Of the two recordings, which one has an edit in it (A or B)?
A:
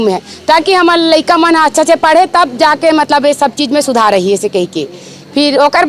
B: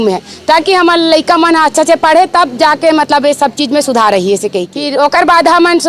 B